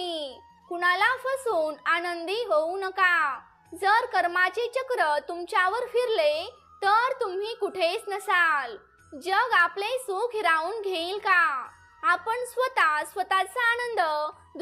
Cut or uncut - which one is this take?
uncut